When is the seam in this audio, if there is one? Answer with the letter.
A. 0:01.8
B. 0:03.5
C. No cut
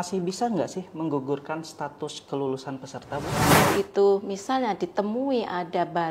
B